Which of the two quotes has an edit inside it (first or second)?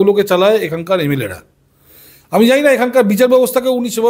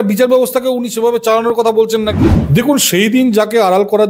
second